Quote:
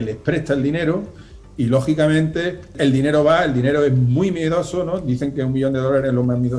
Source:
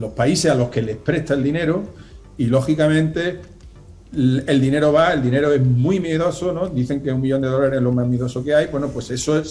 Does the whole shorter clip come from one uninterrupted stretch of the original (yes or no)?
no